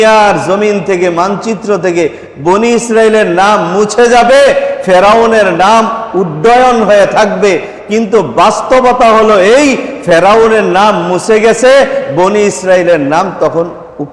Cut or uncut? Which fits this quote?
uncut